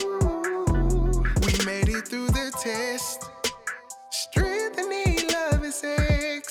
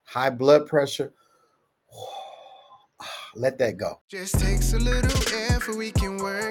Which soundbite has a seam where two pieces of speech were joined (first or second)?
second